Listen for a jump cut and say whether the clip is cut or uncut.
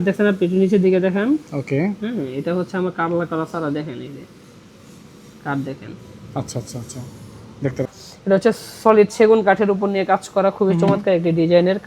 cut